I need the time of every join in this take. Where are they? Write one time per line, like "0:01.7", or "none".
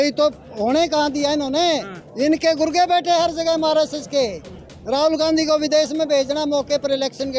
none